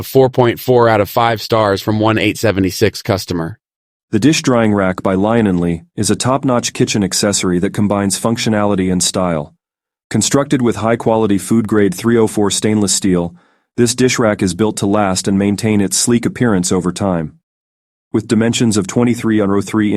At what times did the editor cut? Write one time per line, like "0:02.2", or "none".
0:03.9